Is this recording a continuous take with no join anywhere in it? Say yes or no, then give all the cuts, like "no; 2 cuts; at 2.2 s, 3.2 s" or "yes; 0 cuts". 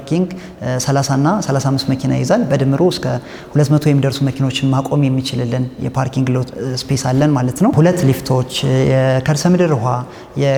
yes; 0 cuts